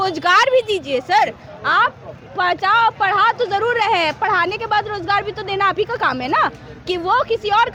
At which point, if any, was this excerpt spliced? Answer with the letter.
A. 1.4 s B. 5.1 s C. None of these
C